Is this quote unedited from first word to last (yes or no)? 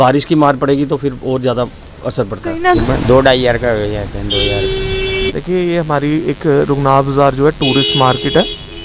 no